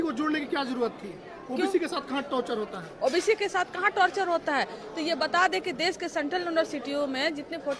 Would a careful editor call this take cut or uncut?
uncut